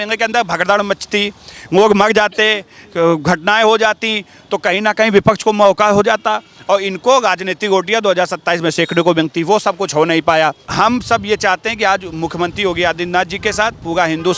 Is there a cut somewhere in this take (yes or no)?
yes